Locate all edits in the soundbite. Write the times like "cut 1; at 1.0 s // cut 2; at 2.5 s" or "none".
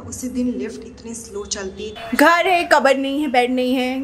cut 1; at 1.9 s